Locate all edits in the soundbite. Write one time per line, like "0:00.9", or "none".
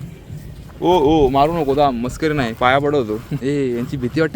0:03.3